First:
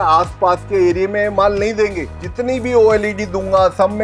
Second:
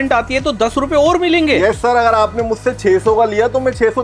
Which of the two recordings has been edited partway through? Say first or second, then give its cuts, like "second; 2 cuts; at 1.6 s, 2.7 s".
first; 1 cut; at 2.0 s